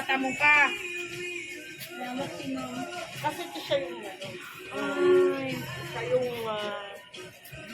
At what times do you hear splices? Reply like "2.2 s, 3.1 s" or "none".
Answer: none

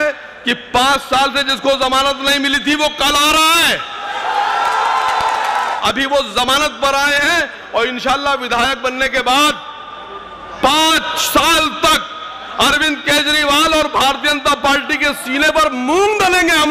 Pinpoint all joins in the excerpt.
5.8 s

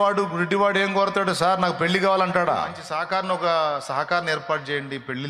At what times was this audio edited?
2.8 s

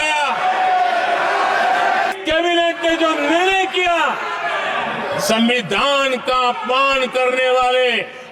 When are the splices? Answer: 2.1 s

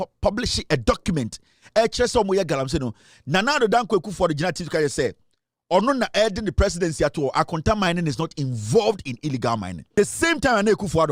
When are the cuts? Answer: 9.8 s

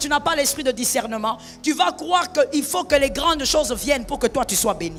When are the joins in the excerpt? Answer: none

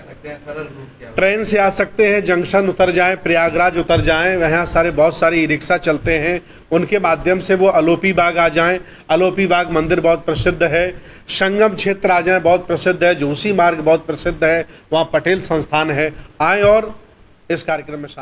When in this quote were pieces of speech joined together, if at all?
none

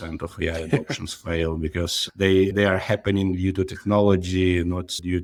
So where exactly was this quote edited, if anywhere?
none

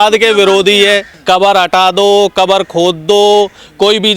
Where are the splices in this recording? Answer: 1.1 s

